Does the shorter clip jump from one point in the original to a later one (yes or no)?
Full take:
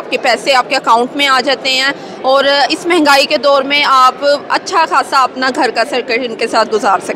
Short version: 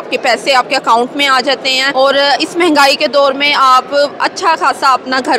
yes